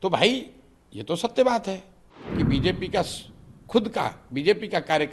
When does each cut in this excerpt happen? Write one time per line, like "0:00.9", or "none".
0:02.4